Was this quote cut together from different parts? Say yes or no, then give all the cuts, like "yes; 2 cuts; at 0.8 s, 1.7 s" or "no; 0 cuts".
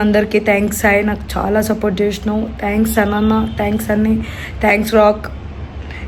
no; 0 cuts